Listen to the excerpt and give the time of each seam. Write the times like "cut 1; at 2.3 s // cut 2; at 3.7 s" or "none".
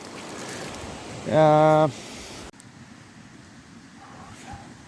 cut 1; at 2.5 s